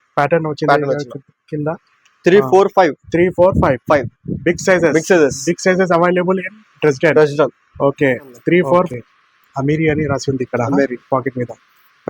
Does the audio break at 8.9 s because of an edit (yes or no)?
yes